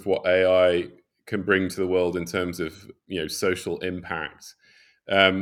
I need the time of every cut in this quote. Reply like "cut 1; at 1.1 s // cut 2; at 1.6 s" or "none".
none